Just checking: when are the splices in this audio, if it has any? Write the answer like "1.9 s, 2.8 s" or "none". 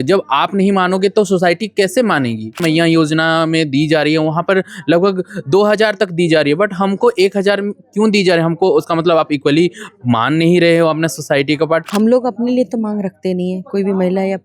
2.6 s, 11.9 s